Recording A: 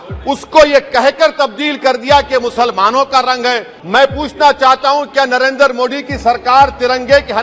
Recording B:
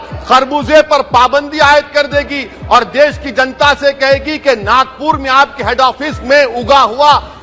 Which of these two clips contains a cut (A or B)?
A